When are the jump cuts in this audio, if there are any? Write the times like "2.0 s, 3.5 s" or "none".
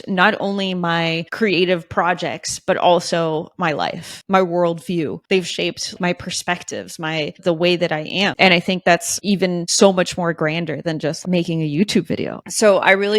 4.1 s, 5.5 s, 8.3 s, 9.4 s, 11.2 s, 12.4 s